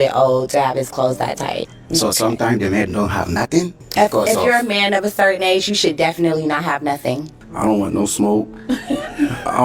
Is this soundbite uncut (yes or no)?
no